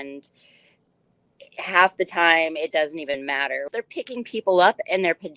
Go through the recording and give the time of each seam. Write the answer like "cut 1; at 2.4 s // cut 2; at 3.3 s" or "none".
cut 1; at 3.7 s